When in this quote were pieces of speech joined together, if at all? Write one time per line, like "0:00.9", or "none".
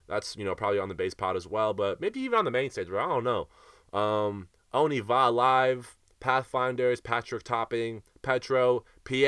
none